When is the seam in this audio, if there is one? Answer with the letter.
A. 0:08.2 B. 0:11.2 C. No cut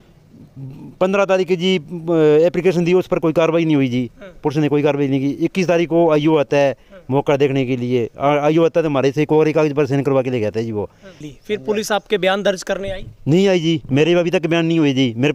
B